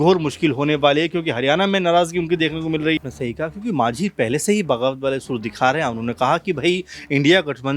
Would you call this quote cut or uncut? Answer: cut